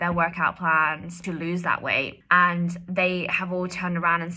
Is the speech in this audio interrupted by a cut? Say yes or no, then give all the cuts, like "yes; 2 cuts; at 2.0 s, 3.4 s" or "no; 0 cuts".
yes; 2 cuts; at 1.2 s, 2.2 s